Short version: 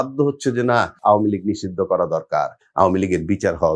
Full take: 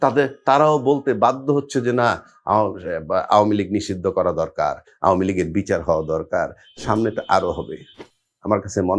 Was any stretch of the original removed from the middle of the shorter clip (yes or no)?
yes